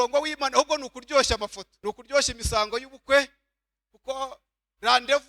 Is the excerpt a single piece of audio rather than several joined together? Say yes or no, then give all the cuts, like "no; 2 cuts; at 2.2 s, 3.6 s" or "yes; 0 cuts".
no; 1 cut; at 1.7 s